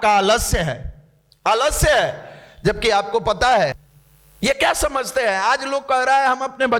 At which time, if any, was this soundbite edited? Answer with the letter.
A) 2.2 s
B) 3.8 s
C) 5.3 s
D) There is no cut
B